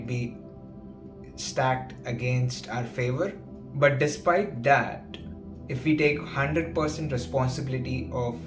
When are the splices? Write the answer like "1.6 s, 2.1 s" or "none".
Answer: 3.6 s